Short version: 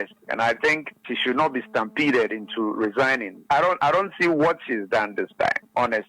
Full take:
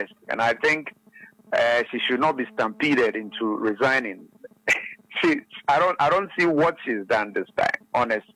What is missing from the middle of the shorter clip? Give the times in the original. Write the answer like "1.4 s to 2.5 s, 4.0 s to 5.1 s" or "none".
1.1 s to 1.9 s, 4.2 s to 5.5 s